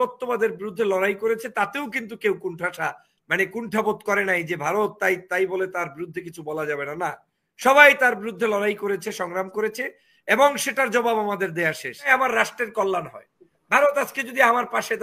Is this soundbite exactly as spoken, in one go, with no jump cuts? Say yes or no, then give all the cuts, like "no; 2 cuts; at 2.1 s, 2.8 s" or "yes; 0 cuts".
no; 1 cut; at 12.1 s